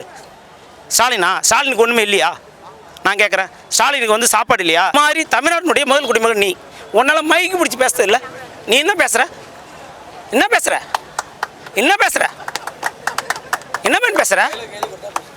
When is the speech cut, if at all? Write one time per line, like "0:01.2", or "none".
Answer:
0:04.9